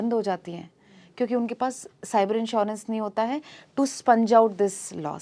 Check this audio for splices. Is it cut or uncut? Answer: uncut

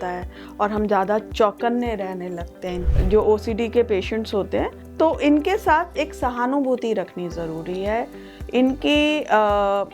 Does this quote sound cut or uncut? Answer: cut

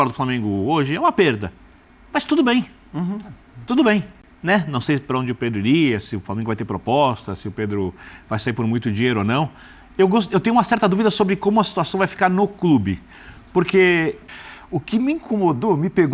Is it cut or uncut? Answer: cut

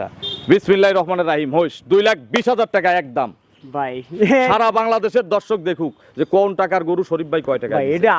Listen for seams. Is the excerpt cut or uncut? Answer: uncut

